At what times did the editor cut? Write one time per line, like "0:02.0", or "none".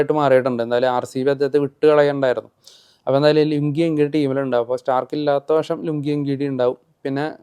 none